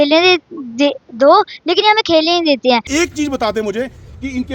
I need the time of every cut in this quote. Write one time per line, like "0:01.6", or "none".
0:02.9